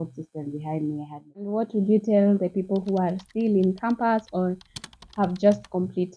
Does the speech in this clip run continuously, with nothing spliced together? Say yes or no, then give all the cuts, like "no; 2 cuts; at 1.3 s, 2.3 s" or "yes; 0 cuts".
no; 1 cut; at 1.5 s